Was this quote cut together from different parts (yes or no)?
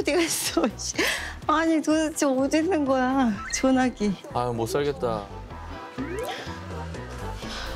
yes